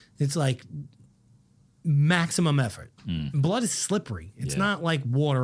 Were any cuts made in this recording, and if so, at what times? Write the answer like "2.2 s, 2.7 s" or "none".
3.3 s